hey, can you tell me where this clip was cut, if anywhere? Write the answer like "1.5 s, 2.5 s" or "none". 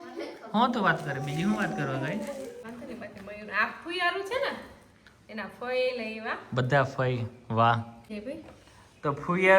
2.6 s, 8.1 s